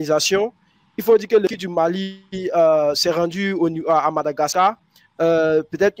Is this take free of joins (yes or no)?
yes